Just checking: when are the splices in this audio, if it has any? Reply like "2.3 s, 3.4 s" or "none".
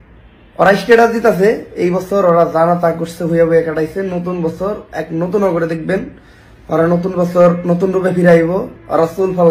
none